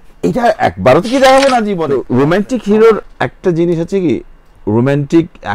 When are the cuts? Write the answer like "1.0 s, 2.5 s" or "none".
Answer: 1.9 s